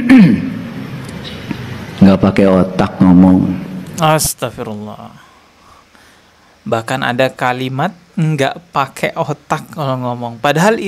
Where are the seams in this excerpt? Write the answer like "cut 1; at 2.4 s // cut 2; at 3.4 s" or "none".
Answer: none